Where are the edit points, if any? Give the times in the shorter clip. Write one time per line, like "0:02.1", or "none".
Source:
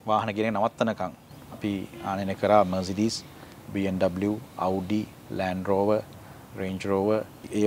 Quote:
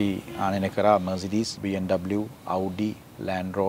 0:01.5

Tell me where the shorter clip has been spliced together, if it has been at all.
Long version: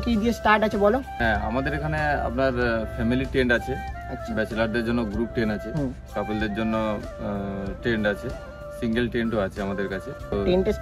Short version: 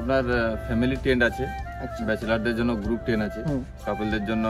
none

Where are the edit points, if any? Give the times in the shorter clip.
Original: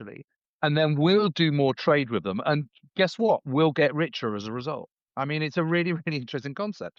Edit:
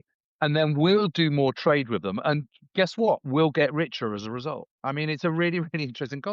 0:04.7

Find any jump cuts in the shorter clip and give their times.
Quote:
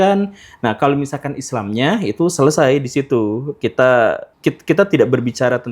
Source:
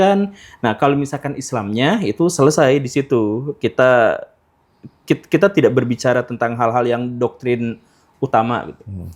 0:04.3

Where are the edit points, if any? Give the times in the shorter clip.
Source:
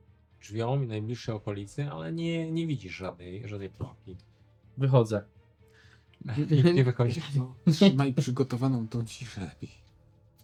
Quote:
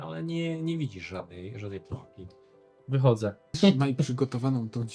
0:03.6

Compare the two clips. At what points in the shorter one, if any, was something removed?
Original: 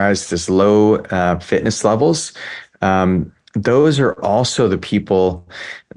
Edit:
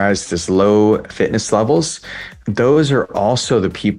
0:01.1
0:02.3

